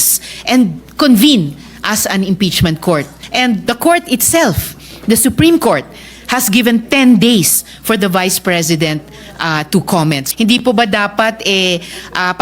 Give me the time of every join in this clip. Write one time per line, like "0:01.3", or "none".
0:03.2
0:10.2

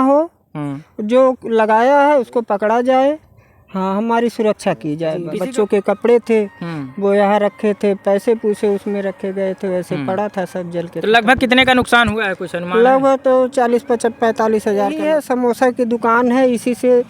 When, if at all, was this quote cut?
0:05.3
0:15.0

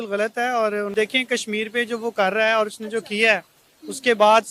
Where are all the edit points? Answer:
0:00.9

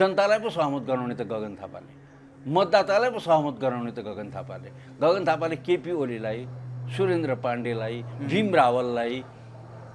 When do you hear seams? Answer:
none

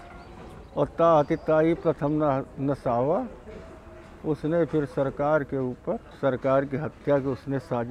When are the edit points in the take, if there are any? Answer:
0:06.1

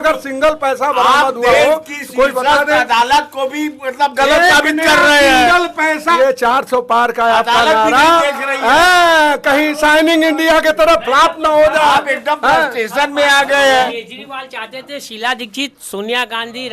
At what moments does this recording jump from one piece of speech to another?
0:06.2
0:13.9

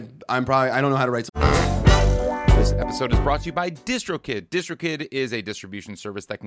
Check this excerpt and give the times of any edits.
0:01.3

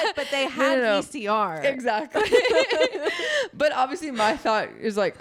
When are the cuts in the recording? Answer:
none

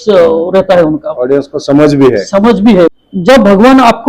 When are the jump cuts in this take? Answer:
0:03.0

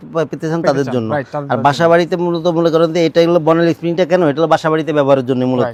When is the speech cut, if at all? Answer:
none

